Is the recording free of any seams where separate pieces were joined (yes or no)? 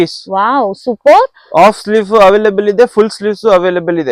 yes